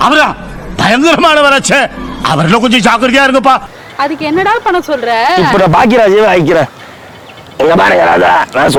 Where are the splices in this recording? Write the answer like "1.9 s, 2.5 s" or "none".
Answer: none